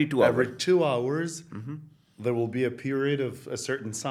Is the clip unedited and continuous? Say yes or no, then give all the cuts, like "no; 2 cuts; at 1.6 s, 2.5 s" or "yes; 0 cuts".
yes; 0 cuts